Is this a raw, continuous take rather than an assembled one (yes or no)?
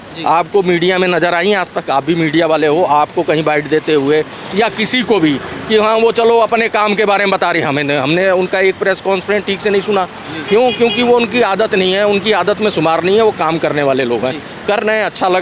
yes